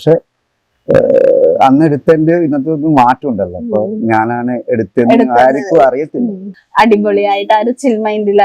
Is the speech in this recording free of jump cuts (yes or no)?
no